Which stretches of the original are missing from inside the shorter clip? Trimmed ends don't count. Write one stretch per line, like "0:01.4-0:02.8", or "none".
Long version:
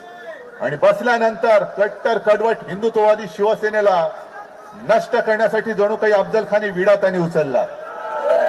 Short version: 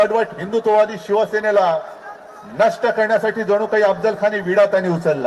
none